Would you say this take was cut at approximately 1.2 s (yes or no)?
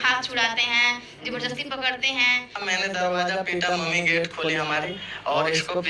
no